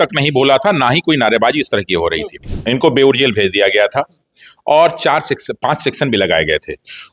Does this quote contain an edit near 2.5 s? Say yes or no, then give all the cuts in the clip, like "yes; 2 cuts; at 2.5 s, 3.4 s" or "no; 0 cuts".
yes; 1 cut; at 2.5 s